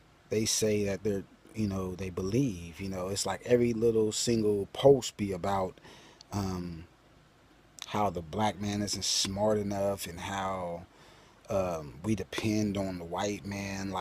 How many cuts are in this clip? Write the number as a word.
one